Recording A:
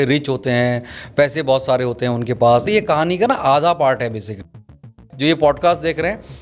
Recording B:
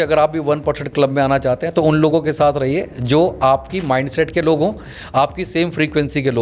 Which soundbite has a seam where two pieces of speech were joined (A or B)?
A